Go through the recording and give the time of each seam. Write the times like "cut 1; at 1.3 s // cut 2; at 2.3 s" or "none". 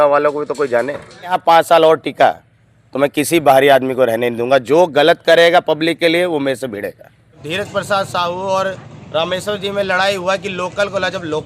cut 1; at 1.4 s // cut 2; at 7.4 s